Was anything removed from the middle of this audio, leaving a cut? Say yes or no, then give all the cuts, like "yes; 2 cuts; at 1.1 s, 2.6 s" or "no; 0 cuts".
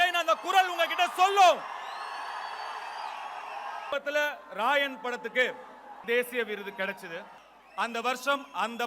yes; 2 cuts; at 3.9 s, 6.0 s